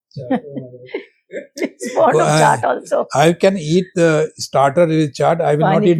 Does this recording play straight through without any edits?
yes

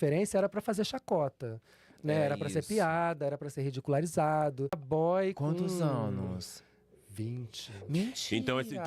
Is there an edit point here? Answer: yes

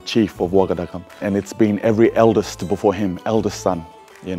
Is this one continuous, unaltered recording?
no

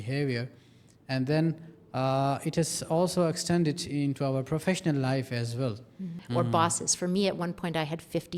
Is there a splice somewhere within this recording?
yes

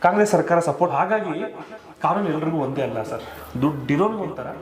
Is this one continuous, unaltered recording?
no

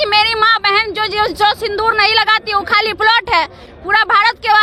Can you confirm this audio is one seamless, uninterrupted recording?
yes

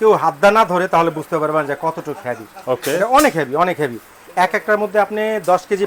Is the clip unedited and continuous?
yes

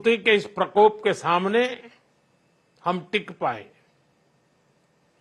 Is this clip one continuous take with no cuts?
yes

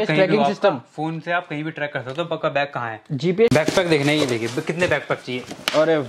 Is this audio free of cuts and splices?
no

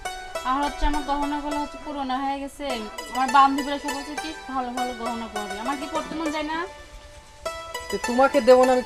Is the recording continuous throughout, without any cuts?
yes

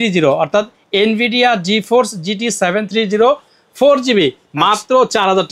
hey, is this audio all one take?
yes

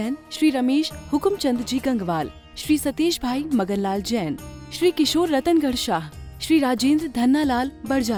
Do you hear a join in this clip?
no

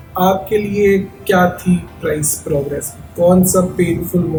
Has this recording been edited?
no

